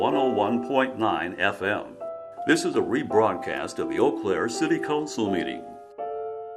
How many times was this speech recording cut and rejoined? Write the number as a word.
one